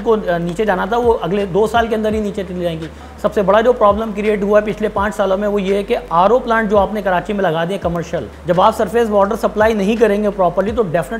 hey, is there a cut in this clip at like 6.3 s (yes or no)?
no